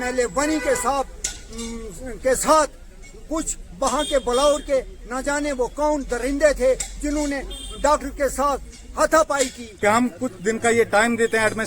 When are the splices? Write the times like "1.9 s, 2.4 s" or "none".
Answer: 9.6 s